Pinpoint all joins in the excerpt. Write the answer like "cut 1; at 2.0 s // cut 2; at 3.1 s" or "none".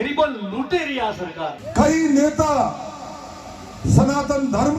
cut 1; at 1.6 s